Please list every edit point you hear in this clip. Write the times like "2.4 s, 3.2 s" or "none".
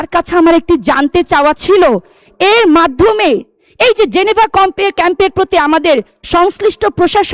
none